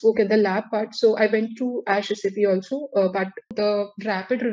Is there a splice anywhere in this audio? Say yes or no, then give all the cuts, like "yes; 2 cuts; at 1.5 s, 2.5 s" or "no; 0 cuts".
yes; 1 cut; at 3.5 s